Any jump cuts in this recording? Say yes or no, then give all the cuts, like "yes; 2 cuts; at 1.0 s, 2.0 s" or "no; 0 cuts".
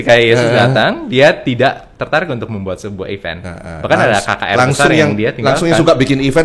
no; 0 cuts